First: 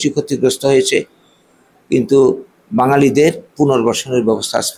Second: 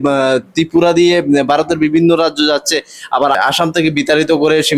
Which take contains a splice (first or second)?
second